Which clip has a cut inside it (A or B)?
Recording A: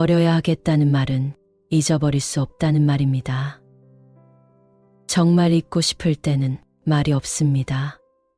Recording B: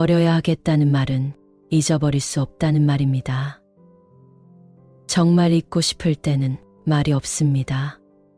A